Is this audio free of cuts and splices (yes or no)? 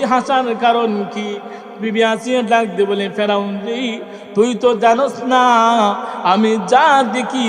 yes